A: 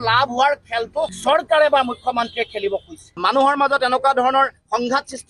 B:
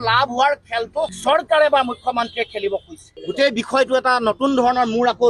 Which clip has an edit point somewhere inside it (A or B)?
A